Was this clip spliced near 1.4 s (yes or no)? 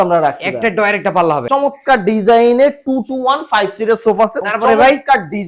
yes